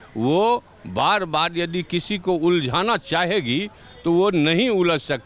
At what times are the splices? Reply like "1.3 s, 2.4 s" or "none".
none